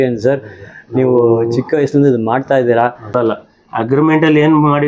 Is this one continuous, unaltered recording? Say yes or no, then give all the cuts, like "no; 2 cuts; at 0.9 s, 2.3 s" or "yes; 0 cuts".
no; 1 cut; at 3.1 s